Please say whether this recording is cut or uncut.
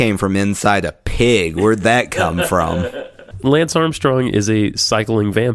cut